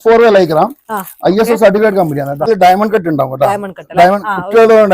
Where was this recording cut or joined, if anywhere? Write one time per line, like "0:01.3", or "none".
0:02.5